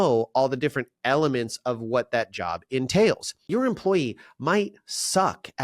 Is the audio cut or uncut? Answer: cut